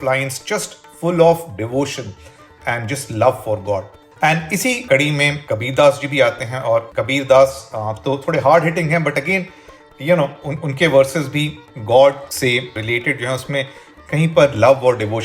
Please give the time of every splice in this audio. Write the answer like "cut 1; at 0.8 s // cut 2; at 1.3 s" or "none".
cut 1; at 4.0 s